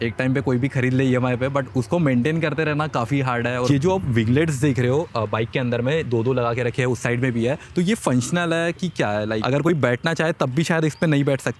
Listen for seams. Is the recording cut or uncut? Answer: cut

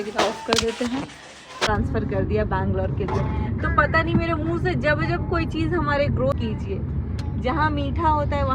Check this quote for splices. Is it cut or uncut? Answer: cut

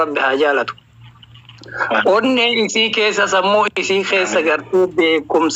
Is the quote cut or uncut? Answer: uncut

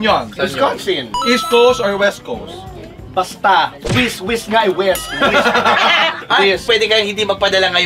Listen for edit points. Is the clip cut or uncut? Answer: cut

